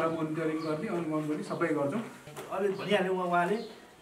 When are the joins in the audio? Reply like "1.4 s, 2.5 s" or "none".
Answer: 2.2 s